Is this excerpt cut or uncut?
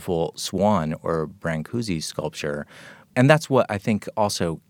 cut